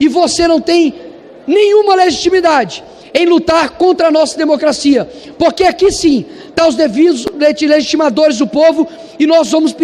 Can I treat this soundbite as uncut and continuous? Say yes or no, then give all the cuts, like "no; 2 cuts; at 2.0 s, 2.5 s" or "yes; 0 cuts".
yes; 0 cuts